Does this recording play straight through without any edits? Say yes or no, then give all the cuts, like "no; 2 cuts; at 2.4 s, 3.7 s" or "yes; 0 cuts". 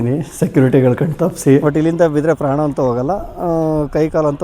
no; 1 cut; at 1.6 s